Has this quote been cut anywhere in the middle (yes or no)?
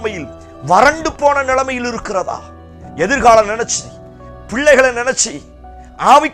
no